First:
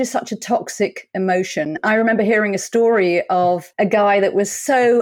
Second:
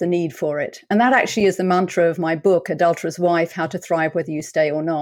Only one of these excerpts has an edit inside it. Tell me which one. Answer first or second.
first